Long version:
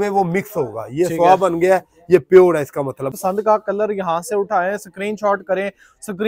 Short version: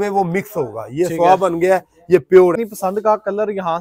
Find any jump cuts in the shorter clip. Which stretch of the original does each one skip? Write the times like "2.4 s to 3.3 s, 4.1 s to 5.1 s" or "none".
2.7 s to 3.1 s